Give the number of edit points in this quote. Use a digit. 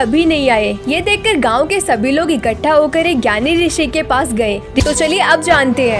1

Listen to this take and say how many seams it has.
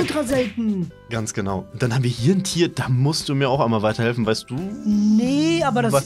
1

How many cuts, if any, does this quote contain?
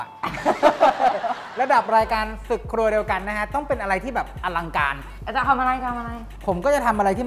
0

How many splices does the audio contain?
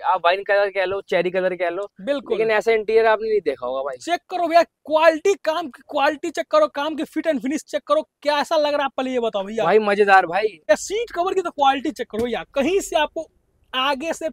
1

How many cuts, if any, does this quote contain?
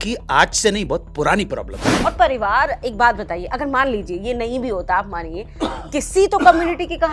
1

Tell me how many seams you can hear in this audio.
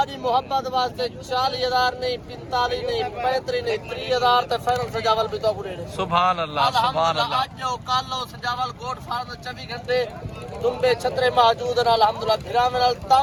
0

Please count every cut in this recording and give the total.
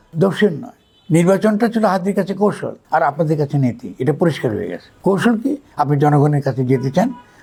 0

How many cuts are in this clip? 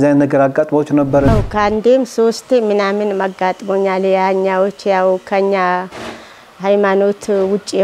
1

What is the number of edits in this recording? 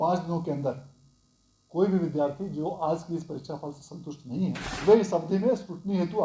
1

